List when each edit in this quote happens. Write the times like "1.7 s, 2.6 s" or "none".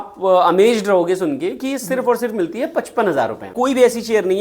3.5 s